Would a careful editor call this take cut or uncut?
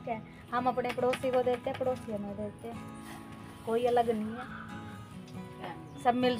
cut